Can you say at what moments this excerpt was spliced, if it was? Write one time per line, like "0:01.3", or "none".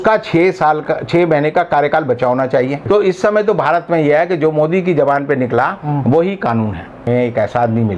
0:02.8
0:07.1